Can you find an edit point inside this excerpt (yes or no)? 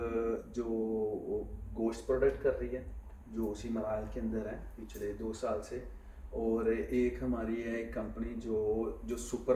no